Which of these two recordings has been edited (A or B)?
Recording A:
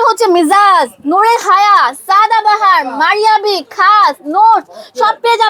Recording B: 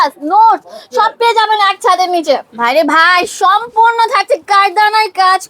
B